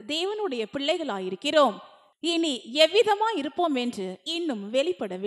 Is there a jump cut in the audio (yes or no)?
no